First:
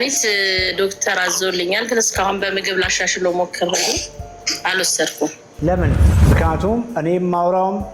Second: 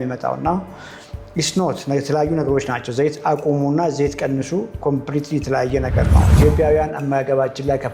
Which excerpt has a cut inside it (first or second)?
first